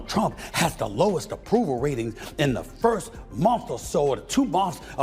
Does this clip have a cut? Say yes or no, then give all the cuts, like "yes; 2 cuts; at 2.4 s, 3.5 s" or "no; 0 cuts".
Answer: no; 0 cuts